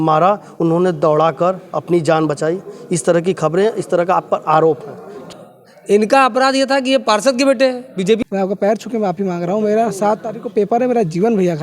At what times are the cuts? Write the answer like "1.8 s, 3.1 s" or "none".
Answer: 5.3 s, 8.2 s